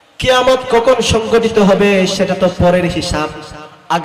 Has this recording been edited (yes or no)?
no